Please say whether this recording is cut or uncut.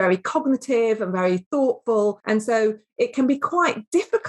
cut